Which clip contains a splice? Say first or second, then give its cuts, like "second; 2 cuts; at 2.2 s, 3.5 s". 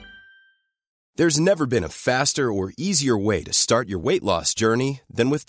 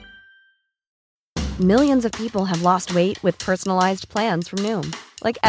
second; 1 cut; at 0.9 s